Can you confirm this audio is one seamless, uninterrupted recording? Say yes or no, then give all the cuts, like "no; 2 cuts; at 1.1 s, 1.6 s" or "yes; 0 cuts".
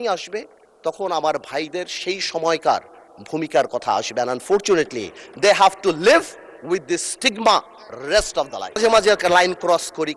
no; 1 cut; at 8.8 s